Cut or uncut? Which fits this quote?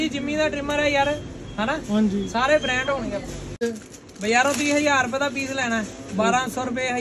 cut